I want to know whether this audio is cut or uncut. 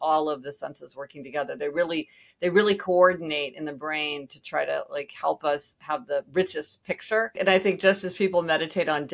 cut